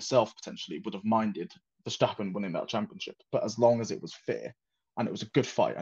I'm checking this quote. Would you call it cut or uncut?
uncut